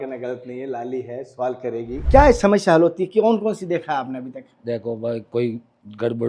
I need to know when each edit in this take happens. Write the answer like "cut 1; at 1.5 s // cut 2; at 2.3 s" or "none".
cut 1; at 2.0 s